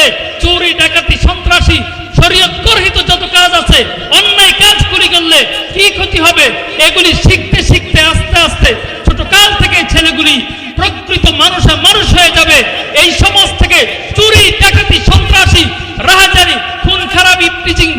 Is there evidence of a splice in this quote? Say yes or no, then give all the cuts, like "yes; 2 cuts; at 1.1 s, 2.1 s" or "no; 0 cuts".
no; 0 cuts